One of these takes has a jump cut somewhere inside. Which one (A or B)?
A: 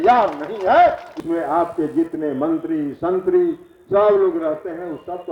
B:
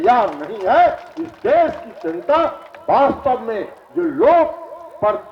A